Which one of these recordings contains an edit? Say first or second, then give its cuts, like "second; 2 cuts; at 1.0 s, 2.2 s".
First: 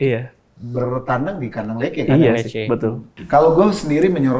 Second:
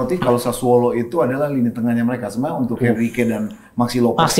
first; 1 cut; at 3.1 s